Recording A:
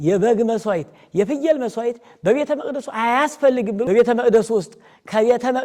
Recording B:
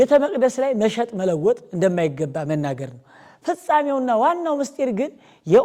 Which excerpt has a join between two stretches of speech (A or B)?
A